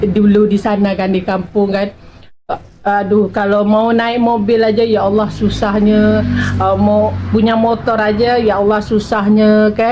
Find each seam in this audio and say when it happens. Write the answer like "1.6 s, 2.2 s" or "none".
none